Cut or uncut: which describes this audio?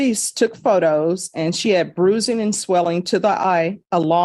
uncut